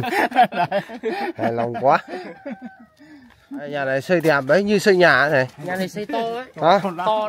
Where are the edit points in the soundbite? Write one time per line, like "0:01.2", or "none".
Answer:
0:03.8